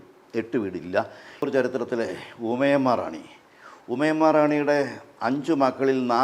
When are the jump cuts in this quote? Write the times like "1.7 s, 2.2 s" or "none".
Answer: 1.4 s